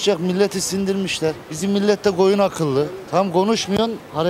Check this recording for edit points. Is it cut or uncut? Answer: uncut